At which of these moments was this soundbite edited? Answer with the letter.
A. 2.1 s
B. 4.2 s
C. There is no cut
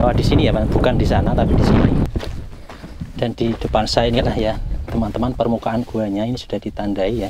A